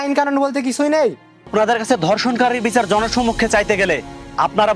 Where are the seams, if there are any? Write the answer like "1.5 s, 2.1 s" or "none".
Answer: 1.5 s